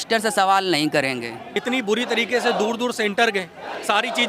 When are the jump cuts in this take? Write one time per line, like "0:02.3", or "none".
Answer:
0:01.5